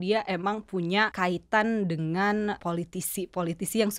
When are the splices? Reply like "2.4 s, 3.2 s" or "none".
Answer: 1.1 s, 2.6 s